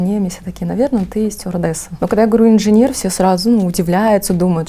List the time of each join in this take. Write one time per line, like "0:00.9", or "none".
0:01.9

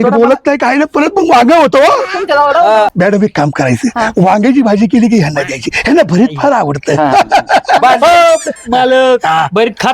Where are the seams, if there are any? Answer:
0:02.9

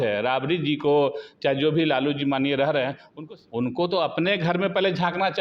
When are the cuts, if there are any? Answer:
0:03.1

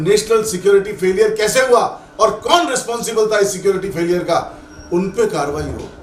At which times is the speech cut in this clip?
none

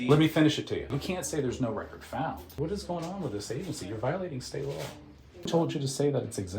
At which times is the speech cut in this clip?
0:00.9
0:02.5
0:05.5

